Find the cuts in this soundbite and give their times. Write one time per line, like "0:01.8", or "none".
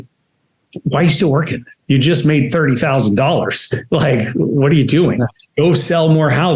none